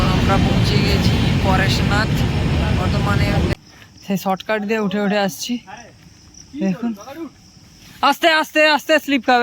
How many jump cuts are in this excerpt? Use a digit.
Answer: 1